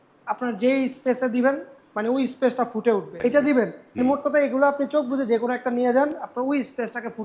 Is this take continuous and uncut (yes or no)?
no